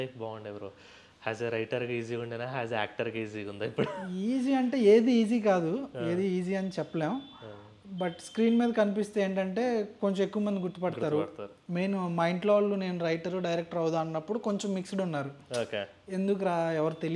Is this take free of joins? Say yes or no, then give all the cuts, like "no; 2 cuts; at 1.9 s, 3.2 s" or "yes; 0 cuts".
yes; 0 cuts